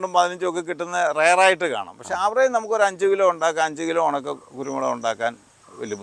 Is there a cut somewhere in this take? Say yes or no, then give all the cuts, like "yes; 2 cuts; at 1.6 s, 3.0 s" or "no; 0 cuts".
no; 0 cuts